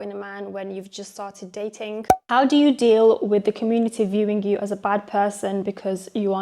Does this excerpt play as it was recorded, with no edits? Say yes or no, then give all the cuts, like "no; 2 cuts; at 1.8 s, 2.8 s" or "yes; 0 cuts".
no; 1 cut; at 2.2 s